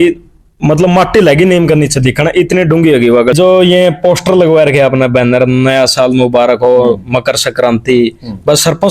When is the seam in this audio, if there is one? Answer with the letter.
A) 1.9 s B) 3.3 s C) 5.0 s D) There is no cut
B